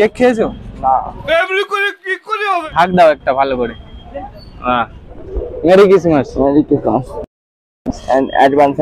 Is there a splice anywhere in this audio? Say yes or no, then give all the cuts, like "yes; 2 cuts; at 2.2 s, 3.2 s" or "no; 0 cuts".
yes; 1 cut; at 2.7 s